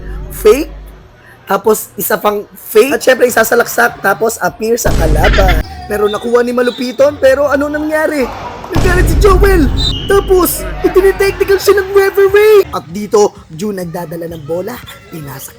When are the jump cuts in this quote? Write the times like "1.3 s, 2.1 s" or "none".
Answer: 5.7 s, 12.8 s